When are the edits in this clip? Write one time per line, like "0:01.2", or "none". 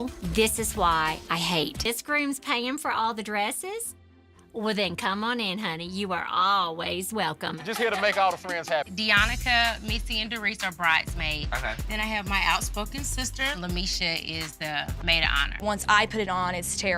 0:01.8
0:08.9
0:15.5